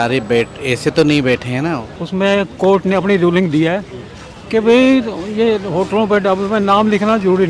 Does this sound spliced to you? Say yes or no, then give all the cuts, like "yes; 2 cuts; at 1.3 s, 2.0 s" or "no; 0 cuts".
yes; 1 cut; at 1.9 s